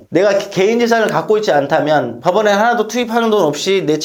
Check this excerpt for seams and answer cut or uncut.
uncut